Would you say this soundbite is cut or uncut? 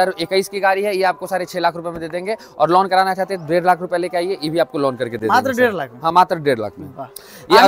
uncut